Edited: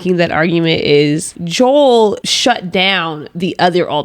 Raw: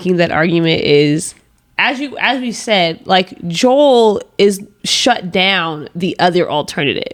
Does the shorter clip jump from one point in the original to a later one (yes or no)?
yes